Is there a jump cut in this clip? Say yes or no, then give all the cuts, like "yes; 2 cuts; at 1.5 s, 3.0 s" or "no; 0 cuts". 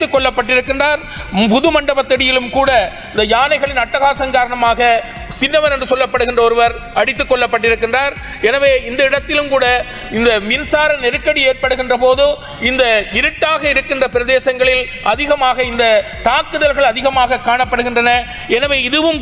no; 0 cuts